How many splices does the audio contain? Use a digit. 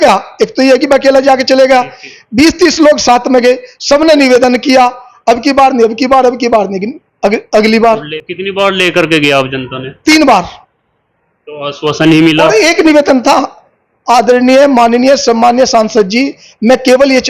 1